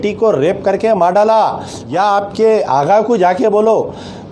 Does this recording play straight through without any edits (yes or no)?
no